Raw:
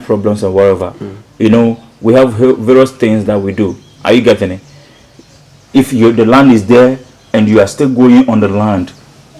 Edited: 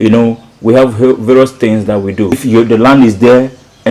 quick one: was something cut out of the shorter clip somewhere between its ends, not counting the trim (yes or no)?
yes